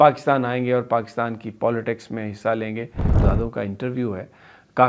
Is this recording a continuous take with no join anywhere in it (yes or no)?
no